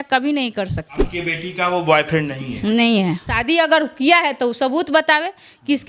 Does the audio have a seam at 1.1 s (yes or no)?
yes